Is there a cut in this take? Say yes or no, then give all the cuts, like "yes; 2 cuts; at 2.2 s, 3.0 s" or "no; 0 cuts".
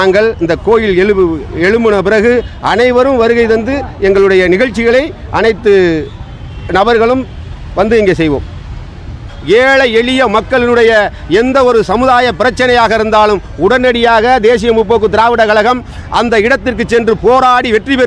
yes; 1 cut; at 9.3 s